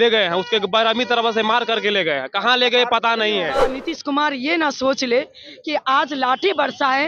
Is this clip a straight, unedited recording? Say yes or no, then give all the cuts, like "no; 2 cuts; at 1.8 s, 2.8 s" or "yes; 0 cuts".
no; 1 cut; at 3.7 s